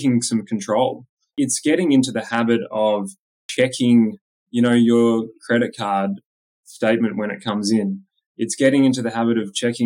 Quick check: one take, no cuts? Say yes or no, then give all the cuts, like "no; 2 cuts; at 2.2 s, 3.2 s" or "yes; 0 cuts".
no; 2 cuts; at 1.3 s, 3.4 s